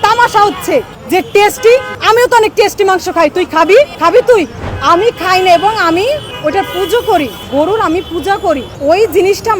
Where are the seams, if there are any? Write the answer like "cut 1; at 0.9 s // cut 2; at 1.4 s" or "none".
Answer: cut 1; at 1.0 s // cut 2; at 1.9 s // cut 3; at 3.9 s // cut 4; at 4.6 s // cut 5; at 6.3 s // cut 6; at 7.4 s // cut 7; at 8.7 s